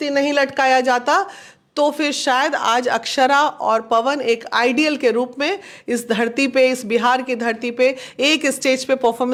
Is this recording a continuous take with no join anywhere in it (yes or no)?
yes